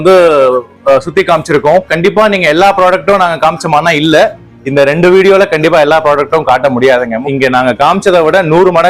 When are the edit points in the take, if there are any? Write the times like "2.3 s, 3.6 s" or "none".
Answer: 7.2 s